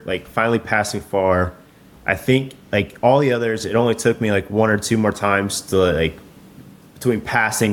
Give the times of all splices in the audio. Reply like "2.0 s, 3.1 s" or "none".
none